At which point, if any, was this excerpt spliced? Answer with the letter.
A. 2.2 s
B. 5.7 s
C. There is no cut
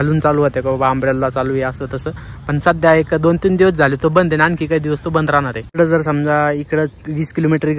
B